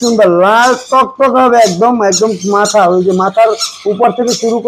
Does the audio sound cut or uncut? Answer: uncut